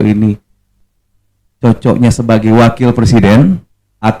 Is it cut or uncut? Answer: uncut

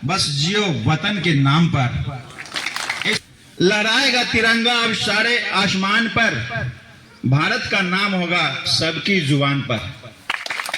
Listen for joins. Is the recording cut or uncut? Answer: cut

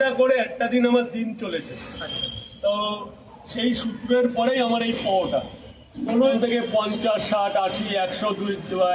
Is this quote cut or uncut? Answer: cut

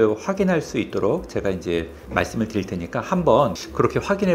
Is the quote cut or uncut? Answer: uncut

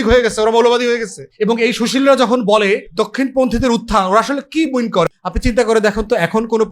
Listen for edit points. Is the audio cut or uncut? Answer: cut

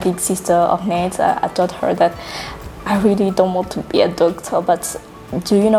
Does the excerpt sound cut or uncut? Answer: uncut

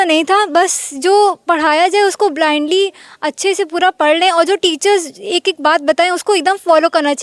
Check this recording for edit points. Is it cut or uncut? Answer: uncut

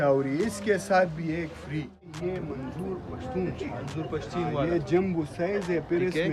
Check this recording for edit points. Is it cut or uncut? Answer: cut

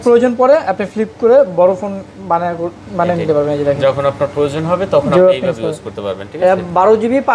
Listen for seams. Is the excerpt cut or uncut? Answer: uncut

